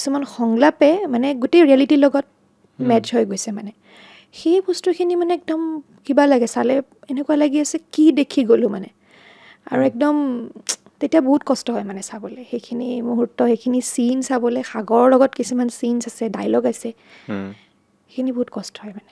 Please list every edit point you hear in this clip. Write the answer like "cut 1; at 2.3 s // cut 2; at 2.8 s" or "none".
none